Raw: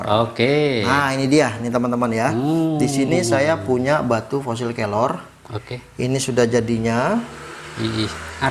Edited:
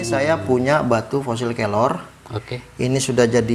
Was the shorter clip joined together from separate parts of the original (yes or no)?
no